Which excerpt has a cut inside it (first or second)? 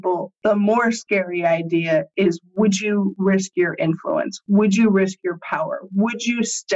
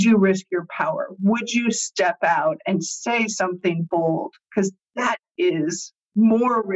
second